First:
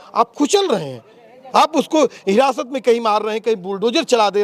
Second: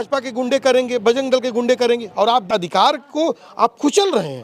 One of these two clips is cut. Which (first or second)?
second